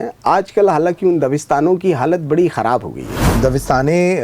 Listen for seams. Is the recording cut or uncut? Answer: cut